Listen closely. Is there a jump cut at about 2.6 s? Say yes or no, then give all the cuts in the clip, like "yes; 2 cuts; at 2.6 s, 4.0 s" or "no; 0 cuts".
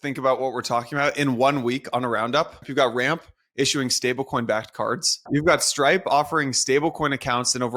yes; 2 cuts; at 2.6 s, 5.3 s